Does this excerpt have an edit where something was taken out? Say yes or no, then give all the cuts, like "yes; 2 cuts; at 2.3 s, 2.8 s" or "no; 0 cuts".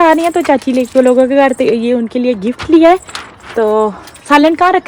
no; 0 cuts